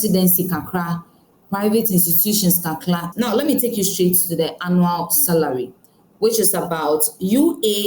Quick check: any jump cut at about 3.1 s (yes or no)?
yes